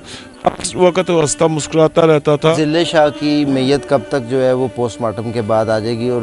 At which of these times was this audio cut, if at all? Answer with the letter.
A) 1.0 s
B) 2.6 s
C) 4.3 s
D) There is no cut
B